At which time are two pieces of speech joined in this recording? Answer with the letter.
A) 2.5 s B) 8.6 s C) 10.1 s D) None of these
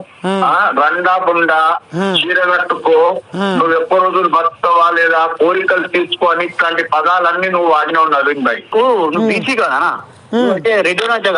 B